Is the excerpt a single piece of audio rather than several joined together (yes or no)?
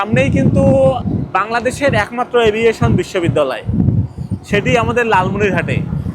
no